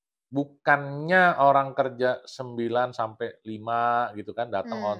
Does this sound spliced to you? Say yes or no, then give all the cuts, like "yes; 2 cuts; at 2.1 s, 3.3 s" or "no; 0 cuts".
no; 0 cuts